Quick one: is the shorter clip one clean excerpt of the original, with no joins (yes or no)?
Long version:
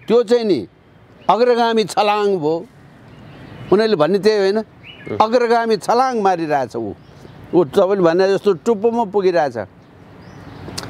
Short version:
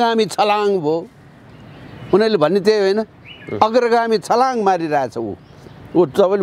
yes